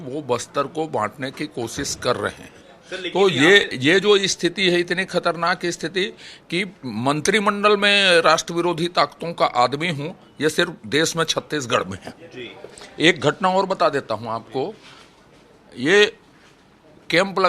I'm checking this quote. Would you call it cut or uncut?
uncut